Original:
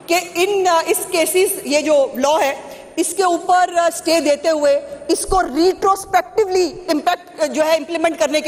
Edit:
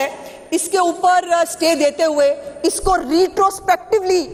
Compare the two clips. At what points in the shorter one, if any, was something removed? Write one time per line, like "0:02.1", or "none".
none